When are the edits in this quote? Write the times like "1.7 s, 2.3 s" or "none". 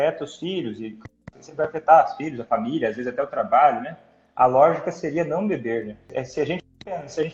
6.1 s